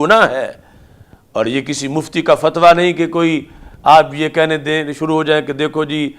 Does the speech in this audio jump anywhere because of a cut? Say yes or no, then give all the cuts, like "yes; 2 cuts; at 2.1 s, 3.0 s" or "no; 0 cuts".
no; 0 cuts